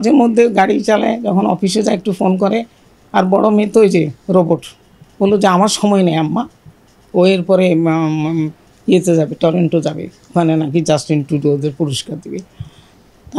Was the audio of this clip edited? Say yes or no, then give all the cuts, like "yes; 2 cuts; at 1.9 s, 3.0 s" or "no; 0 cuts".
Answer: no; 0 cuts